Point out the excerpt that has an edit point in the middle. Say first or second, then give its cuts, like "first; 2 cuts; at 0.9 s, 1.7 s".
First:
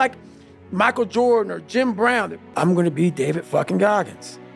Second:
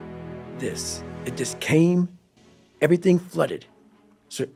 first; 1 cut; at 2.4 s